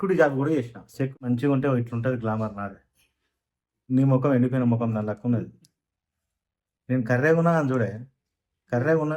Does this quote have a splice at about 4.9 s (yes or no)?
no